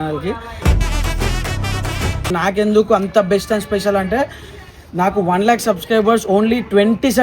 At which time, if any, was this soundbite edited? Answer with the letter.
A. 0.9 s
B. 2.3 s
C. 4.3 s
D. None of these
B